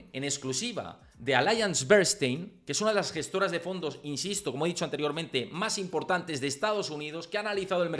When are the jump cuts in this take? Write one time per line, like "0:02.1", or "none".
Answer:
none